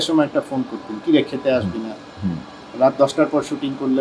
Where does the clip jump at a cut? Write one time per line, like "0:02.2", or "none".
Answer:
none